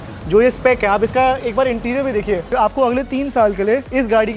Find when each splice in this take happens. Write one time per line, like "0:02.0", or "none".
0:02.5